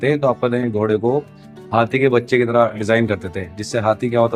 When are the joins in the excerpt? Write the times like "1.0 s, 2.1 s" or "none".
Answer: none